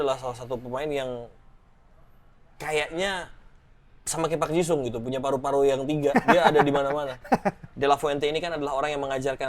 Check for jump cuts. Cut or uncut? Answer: cut